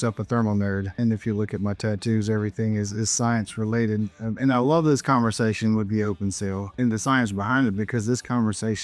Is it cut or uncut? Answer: cut